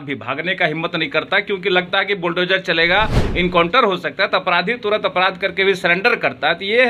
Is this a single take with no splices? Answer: yes; 0 cuts

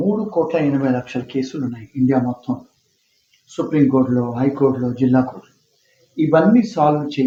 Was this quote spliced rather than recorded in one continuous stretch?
no; 0 cuts

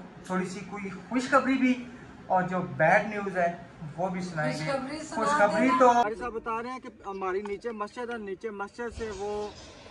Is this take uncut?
no; 1 cut; at 6.0 s

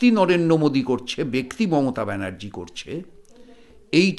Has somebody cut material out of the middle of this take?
no; 0 cuts

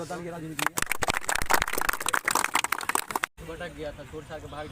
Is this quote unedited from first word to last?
no; 1 cut; at 3.3 s

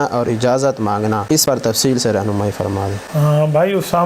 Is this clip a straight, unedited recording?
no; 2 cuts; at 1.4 s, 3.0 s

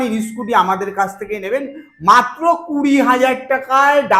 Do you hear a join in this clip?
no; 0 cuts

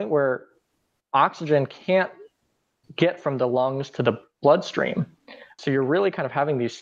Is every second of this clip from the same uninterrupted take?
no; 1 cut; at 5.5 s

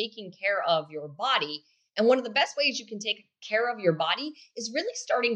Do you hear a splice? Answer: no; 0 cuts

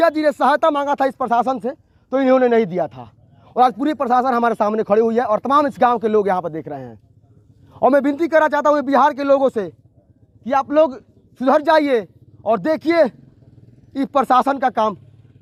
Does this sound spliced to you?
no; 0 cuts

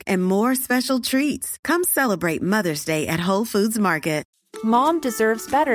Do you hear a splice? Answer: yes; 1 cut; at 4.3 s

